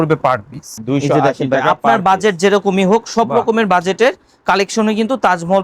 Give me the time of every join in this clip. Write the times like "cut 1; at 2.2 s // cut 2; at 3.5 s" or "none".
none